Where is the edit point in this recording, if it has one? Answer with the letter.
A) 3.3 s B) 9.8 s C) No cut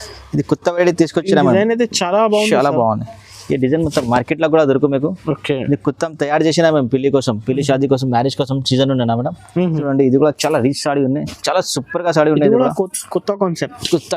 B